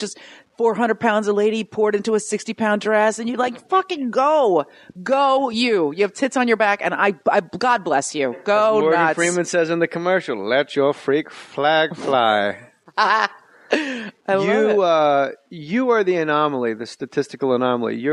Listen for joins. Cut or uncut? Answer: uncut